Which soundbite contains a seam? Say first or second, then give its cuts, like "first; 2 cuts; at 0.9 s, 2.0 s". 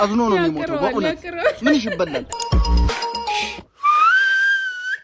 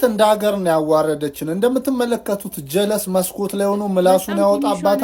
first; 1 cut; at 2.3 s